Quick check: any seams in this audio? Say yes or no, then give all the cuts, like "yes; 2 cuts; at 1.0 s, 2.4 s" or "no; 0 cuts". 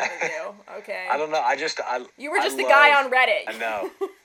no; 0 cuts